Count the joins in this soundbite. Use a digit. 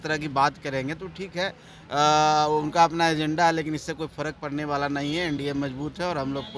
0